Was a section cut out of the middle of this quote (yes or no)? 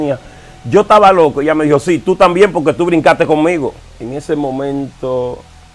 yes